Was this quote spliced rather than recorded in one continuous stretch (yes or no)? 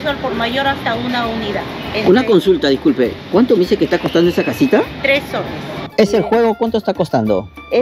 yes